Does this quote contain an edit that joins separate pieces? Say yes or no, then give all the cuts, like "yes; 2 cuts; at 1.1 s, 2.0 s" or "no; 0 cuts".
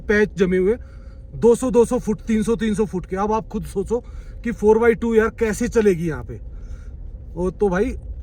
no; 0 cuts